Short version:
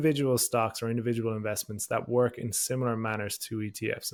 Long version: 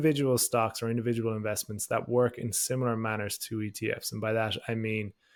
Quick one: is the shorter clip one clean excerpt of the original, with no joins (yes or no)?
yes